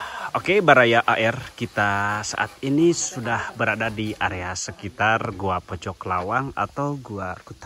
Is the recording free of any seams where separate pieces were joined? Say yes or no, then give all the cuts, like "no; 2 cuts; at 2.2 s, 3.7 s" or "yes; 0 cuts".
yes; 0 cuts